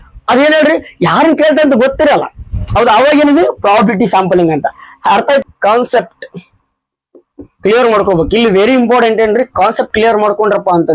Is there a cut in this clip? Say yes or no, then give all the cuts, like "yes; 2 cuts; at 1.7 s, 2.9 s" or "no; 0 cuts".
yes; 1 cut; at 5.4 s